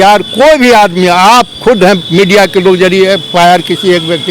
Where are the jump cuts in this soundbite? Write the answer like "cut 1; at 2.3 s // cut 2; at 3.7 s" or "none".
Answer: none